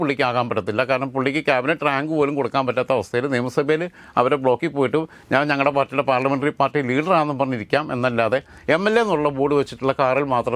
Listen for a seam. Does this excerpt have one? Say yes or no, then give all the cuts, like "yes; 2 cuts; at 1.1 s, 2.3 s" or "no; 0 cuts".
no; 0 cuts